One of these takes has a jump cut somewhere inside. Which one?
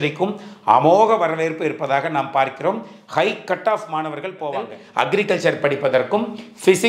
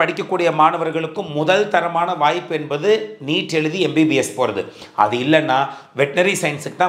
first; 1 cut; at 4.8 s

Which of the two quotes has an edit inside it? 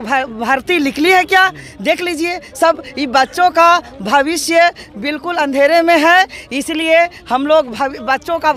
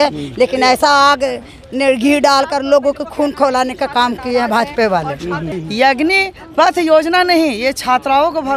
second; 1 cut; at 5.5 s

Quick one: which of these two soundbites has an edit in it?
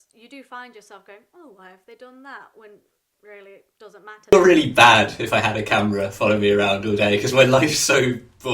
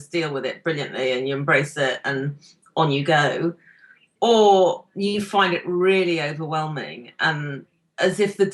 first; 1 cut; at 4.3 s

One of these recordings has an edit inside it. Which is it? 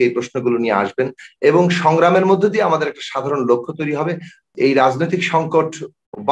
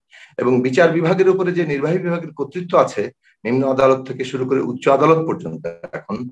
first; 1 cut; at 4.5 s

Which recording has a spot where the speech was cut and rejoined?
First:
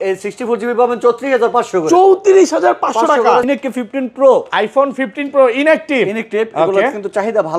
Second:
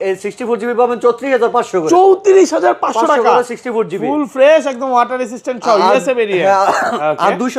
first; 1 cut; at 3.5 s

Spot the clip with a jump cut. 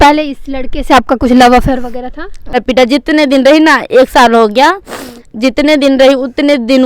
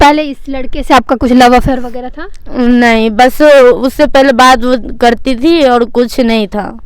first; 1 cut; at 2.6 s

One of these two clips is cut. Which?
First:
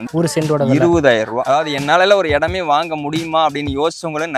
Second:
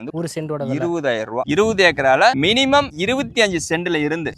first; 1 cut; at 1.4 s

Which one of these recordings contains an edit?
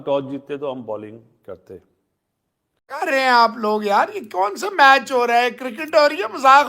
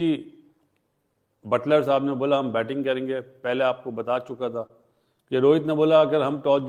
first; 1 cut; at 2.9 s

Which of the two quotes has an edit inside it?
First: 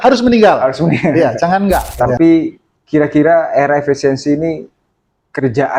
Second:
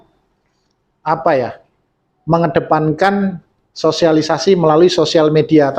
first; 1 cut; at 2.0 s

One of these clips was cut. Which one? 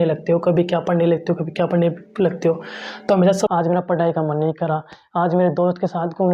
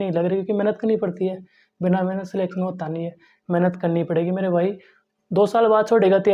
first; 1 cut; at 3.5 s

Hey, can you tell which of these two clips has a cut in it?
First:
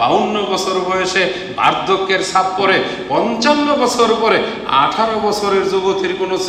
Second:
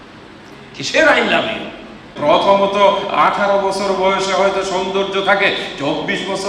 second; 1 cut; at 2.1 s

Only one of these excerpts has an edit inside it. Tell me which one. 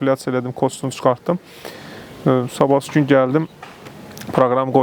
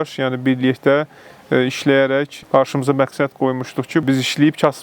second; 2 cuts; at 2.4 s, 4.0 s

